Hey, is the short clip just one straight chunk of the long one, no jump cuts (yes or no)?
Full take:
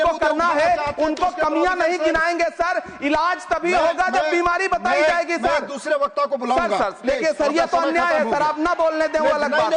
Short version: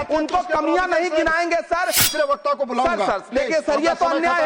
no